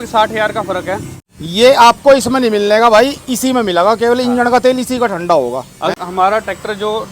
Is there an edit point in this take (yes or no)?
yes